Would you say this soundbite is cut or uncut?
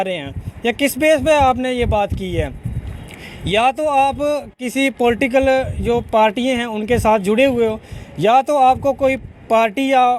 uncut